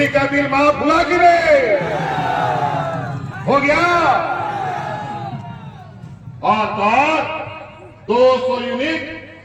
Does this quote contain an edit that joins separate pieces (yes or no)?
no